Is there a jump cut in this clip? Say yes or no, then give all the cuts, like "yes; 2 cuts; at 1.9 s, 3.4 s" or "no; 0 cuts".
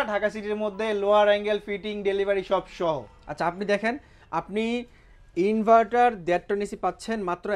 no; 0 cuts